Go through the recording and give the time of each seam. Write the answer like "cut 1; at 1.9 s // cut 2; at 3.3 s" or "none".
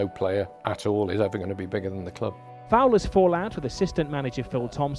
cut 1; at 2.5 s